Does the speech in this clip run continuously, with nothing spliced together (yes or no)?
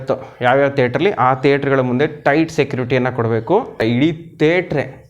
no